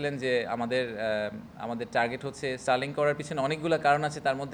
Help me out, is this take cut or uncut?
uncut